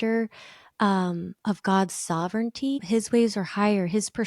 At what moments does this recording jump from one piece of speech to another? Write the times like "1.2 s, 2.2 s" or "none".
2.8 s